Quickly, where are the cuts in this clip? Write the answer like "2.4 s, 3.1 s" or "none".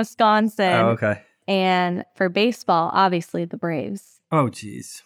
1.2 s